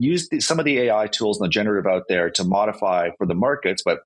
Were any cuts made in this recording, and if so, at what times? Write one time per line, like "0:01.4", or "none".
none